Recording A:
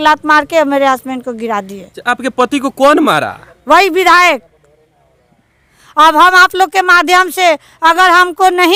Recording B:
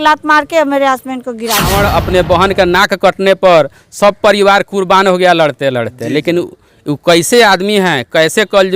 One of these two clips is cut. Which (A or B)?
B